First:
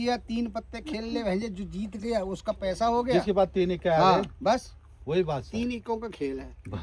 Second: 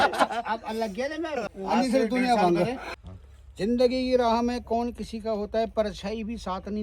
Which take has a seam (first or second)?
second